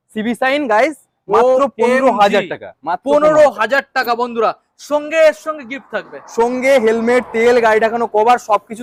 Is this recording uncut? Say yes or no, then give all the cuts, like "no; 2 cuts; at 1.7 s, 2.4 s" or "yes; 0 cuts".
yes; 0 cuts